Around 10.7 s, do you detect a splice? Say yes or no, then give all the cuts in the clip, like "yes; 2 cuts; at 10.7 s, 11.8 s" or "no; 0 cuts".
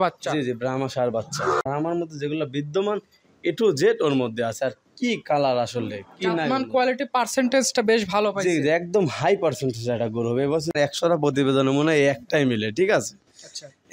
yes; 2 cuts; at 1.6 s, 10.7 s